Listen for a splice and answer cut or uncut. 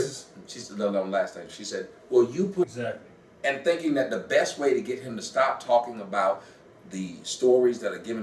uncut